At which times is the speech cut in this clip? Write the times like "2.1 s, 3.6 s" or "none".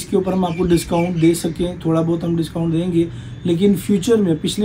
none